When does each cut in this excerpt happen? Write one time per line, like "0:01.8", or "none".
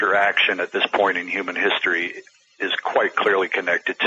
none